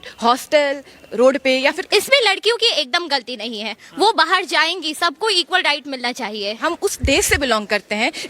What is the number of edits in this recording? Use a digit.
2